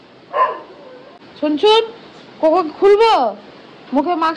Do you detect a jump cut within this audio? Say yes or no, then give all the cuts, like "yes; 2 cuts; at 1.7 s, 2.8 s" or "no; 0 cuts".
yes; 1 cut; at 1.2 s